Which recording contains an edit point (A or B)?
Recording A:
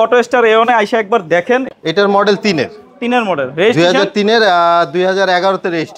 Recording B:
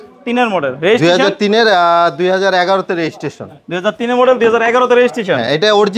A